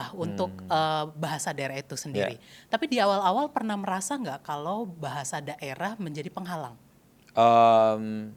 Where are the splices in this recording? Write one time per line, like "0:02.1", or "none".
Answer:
none